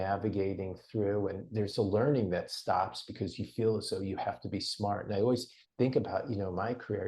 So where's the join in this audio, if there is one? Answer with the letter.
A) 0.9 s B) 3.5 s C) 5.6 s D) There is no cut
C